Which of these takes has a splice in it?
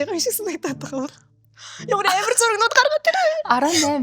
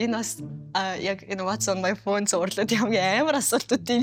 first; 1 cut; at 1.2 s

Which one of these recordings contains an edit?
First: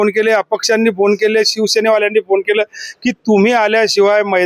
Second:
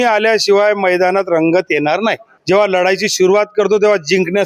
second; 1 cut; at 2.3 s

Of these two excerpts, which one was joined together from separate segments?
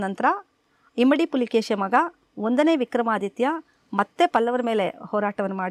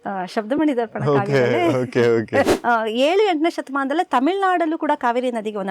second; 1 cut; at 2.6 s

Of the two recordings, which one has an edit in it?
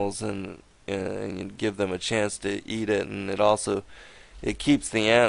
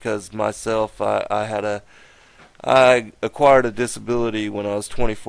second; 1 cut; at 3.6 s

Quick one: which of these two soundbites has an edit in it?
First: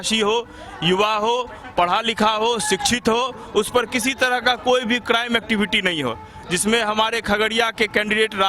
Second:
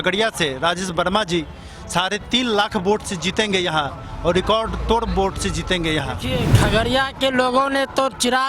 second; 1 cut; at 6.3 s

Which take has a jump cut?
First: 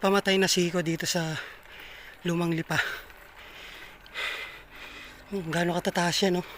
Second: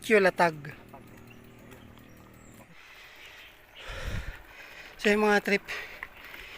second; 1 cut; at 2.6 s

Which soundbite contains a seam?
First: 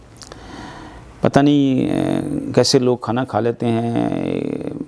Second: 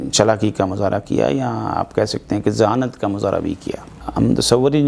second; 1 cut; at 4.0 s

